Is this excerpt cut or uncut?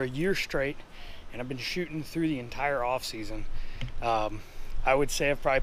uncut